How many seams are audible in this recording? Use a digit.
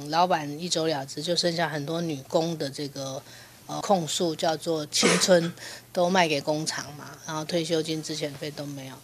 0